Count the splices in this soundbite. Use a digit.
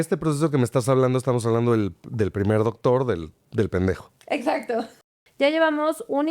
1